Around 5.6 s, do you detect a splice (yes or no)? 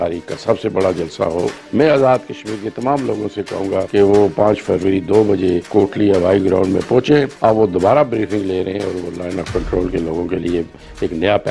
yes